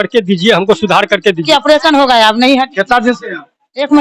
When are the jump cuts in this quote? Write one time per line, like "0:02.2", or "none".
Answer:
0:01.4